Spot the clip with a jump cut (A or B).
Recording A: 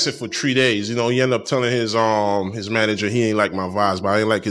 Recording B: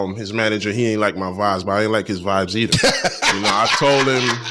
B